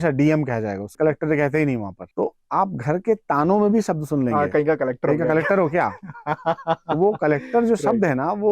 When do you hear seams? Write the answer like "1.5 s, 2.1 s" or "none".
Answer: 0.9 s, 2.0 s